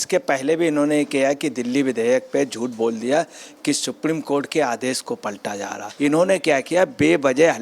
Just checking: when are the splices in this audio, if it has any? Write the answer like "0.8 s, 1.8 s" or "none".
5.8 s